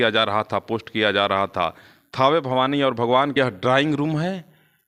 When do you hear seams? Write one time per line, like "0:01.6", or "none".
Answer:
0:03.4